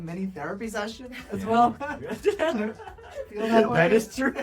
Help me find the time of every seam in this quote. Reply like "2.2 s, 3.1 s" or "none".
none